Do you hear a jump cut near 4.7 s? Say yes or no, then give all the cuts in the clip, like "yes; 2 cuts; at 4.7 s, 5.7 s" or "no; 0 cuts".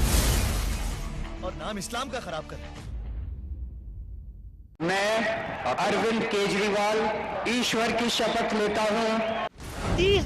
yes; 1 cut; at 4.7 s